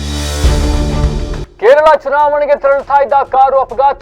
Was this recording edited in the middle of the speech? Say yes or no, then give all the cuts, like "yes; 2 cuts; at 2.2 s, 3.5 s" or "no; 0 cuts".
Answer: yes; 1 cut; at 1.4 s